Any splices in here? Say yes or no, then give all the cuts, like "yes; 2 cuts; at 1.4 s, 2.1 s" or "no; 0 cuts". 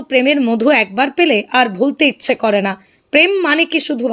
yes; 1 cut; at 3.0 s